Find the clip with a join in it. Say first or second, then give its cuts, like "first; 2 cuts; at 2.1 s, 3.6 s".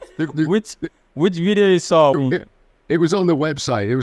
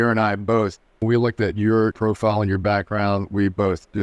second; 2 cuts; at 1.0 s, 1.9 s